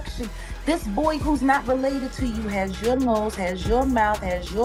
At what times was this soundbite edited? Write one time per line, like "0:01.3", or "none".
none